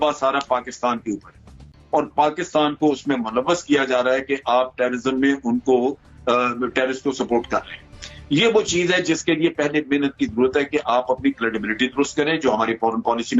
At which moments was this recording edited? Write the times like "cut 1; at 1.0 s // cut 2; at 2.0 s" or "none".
none